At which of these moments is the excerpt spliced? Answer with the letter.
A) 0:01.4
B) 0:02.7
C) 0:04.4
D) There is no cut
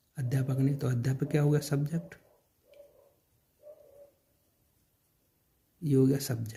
D